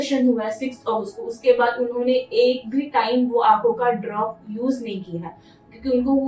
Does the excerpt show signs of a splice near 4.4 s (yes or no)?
no